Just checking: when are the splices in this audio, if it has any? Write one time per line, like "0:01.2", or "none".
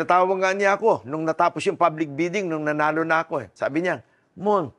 0:03.5

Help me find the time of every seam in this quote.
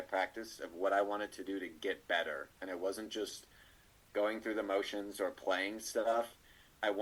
none

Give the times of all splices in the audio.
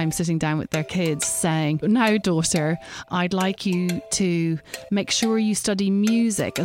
0:01.8
0:03.1

